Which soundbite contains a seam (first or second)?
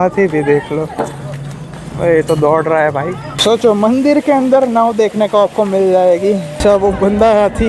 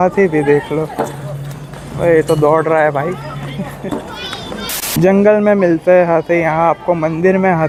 first